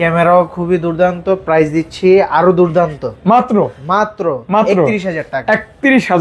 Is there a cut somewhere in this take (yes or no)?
no